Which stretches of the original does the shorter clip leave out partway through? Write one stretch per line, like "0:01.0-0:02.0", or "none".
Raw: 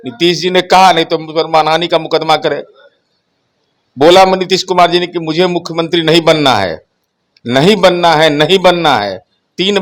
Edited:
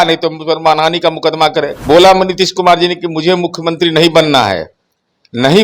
0:02.6-0:03.9